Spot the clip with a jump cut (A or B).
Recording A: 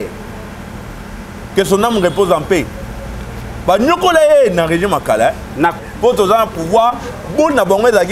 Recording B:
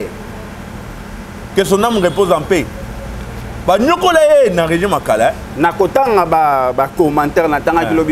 A